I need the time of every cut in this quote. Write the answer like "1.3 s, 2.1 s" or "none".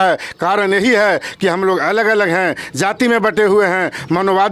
none